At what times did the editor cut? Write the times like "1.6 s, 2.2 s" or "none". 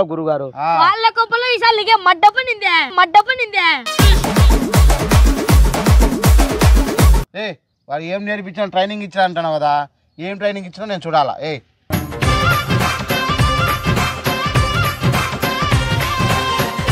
7.3 s, 11.9 s